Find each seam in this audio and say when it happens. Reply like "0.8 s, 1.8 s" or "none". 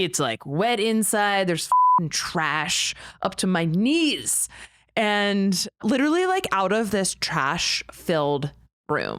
5.8 s